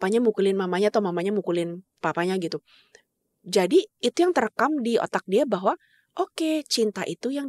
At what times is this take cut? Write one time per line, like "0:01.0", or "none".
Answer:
none